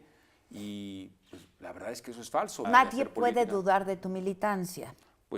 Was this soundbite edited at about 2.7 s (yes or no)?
yes